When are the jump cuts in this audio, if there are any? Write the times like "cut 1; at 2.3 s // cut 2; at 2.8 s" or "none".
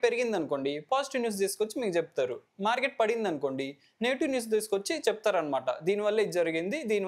none